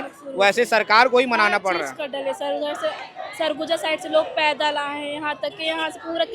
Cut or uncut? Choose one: uncut